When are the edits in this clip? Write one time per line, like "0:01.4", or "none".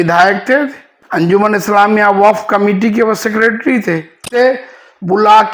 0:01.3
0:04.4